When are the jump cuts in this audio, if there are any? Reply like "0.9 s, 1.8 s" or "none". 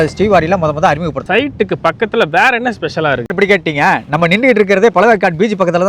1.2 s, 3.3 s